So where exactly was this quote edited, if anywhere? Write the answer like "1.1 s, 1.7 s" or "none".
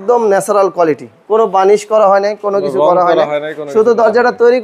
none